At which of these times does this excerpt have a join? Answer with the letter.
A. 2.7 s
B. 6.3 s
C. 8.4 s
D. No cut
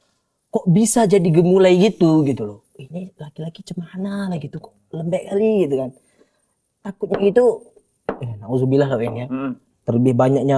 A